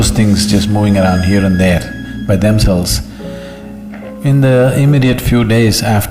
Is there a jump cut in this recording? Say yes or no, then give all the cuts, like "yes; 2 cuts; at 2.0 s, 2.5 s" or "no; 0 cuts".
no; 0 cuts